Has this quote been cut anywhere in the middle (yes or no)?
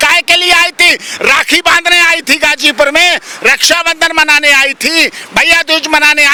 no